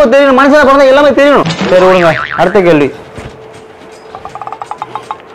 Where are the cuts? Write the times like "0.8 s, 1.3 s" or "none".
1.6 s